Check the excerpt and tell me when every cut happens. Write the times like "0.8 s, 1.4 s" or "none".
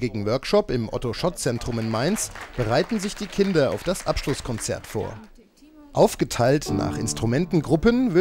5.3 s